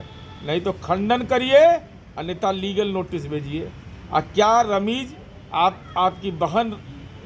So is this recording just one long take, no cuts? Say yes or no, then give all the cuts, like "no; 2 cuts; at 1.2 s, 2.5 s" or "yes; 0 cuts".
yes; 0 cuts